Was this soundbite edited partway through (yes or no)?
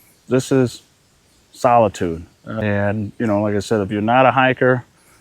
yes